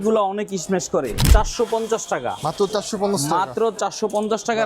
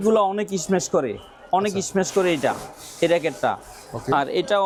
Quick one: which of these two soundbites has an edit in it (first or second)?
first